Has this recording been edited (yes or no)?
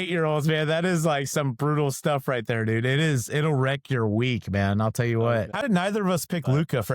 yes